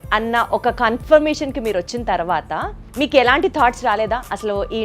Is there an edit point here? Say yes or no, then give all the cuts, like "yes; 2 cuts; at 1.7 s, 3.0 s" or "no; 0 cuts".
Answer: yes; 1 cut; at 2.8 s